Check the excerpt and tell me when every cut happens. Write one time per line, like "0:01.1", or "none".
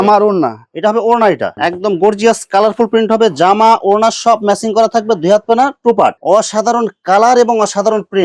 0:01.6
0:06.2